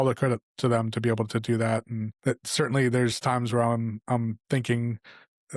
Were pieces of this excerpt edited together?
yes; 1 cut; at 2.0 s

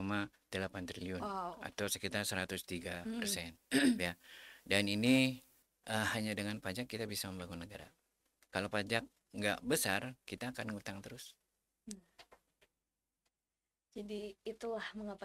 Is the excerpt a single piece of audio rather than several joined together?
no; 1 cut; at 5.5 s

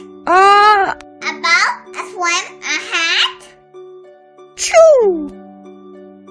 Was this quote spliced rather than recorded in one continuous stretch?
no; 0 cuts

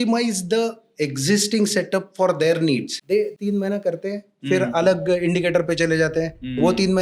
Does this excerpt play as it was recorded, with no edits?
no; 1 cut; at 3.3 s

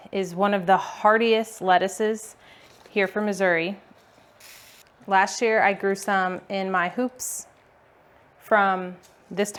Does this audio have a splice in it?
no; 0 cuts

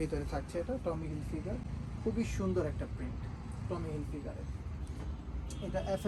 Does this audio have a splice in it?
no; 0 cuts

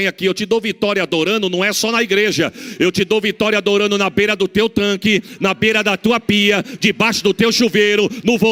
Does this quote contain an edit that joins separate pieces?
no; 0 cuts

